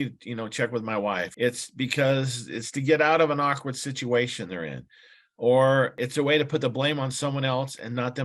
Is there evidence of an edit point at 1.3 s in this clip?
yes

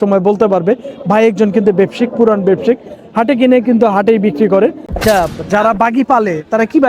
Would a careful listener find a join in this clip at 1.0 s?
no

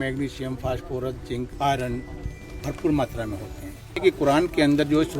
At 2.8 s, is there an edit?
no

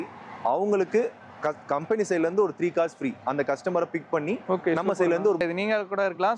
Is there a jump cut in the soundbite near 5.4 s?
yes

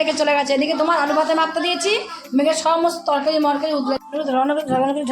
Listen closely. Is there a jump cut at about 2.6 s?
no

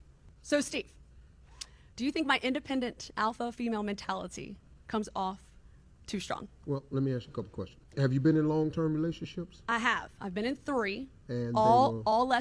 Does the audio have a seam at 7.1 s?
yes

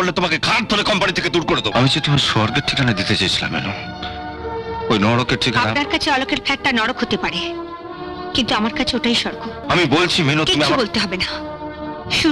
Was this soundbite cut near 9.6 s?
yes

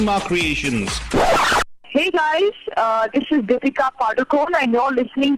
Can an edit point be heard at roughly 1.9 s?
yes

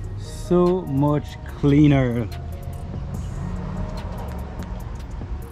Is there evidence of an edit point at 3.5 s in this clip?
no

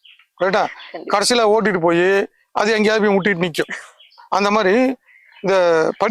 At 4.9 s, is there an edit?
no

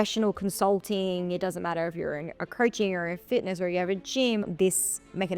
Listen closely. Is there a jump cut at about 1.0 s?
no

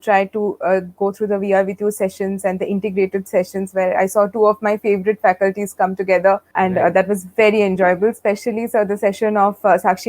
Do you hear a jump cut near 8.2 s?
no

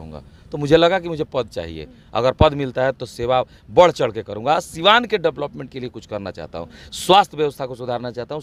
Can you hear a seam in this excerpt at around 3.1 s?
no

